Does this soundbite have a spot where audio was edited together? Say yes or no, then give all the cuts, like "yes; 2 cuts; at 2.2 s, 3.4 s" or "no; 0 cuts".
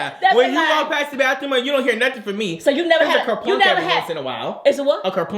no; 0 cuts